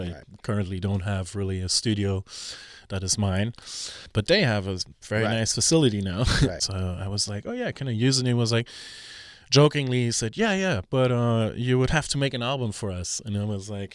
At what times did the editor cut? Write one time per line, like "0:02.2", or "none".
0:04.0
0:06.6